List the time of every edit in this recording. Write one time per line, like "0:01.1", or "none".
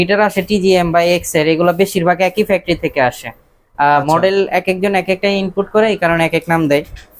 none